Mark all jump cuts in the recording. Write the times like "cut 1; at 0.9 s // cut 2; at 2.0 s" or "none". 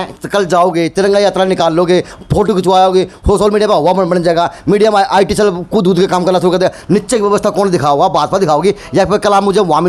none